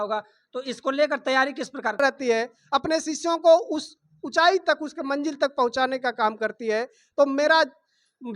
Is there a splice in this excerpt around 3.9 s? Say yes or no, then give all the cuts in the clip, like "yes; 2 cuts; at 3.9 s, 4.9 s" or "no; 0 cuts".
no; 1 cut; at 2.0 s